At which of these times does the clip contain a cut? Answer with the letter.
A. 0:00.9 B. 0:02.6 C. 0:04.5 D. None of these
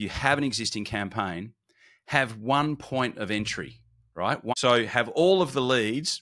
C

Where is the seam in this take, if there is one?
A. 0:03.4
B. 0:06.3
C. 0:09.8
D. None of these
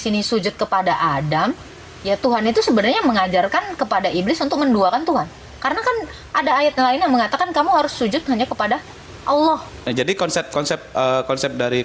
C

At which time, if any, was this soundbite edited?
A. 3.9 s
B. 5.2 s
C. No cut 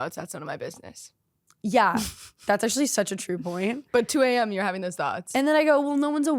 B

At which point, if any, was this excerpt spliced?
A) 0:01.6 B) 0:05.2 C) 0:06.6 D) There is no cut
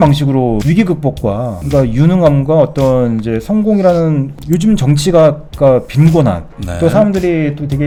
D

